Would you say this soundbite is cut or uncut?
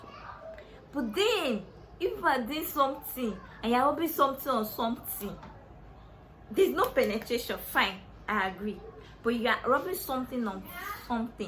uncut